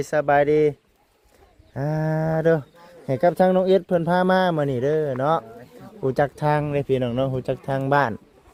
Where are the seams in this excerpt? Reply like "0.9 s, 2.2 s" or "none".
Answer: none